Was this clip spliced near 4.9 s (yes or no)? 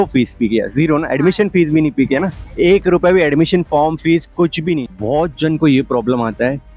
yes